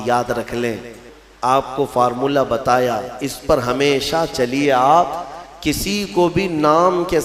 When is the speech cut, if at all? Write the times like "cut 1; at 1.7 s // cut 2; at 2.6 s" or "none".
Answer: cut 1; at 1.1 s